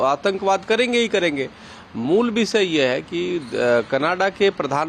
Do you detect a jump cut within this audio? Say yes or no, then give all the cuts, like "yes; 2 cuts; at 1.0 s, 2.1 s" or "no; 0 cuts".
no; 0 cuts